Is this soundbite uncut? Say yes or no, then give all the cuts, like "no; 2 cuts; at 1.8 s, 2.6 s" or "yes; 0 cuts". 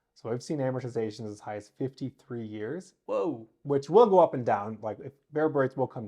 yes; 0 cuts